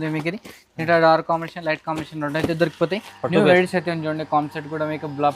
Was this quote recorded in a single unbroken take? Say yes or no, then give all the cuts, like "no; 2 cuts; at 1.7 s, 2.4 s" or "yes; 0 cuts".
no; 1 cut; at 3.1 s